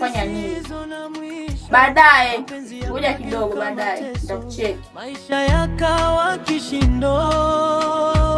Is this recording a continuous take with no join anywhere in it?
no; 1 cut; at 5.2 s

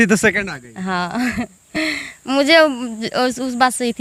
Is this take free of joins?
yes; 0 cuts

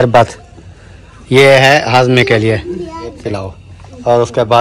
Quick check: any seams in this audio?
yes; 1 cut; at 3.2 s

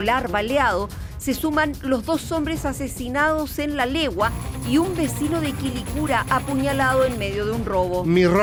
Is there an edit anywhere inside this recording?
no; 0 cuts

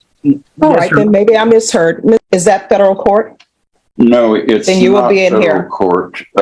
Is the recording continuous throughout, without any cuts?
no; 1 cut; at 2.2 s

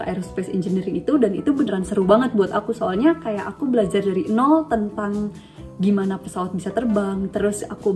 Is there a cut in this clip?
no; 0 cuts

